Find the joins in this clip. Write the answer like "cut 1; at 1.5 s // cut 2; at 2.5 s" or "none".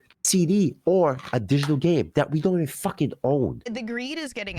cut 1; at 3.6 s